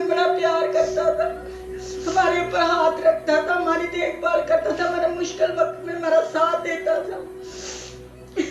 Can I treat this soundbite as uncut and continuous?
yes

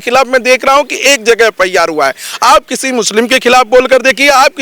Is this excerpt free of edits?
yes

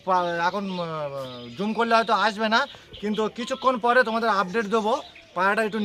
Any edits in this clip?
no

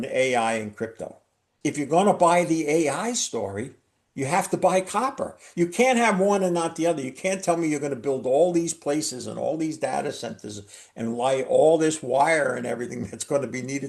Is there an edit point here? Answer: yes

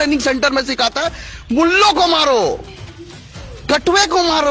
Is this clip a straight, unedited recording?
yes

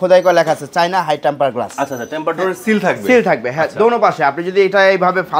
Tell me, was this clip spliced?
no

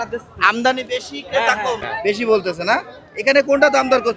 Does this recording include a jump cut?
yes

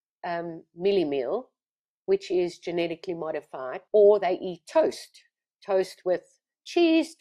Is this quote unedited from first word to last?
no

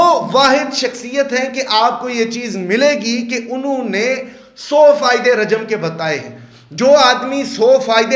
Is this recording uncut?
yes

